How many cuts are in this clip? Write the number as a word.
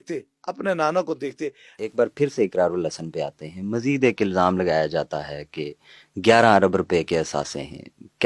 one